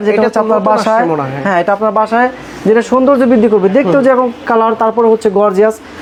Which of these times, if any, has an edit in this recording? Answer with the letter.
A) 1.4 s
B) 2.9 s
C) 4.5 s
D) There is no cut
D